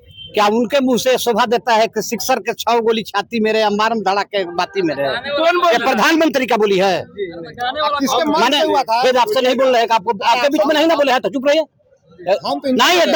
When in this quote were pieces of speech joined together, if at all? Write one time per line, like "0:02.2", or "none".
none